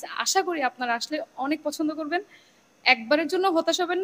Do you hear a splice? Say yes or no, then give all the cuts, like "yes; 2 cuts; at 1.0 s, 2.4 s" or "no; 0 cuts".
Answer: no; 0 cuts